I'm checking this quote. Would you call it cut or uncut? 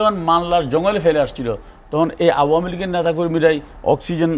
uncut